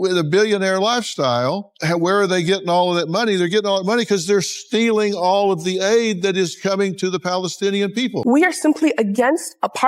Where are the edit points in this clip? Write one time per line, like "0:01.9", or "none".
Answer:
0:01.7
0:08.2